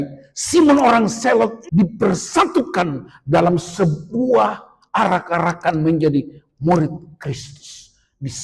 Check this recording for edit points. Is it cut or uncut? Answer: cut